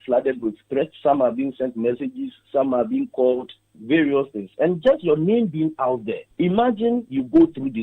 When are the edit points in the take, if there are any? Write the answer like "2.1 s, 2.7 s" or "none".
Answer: 0.9 s, 6.2 s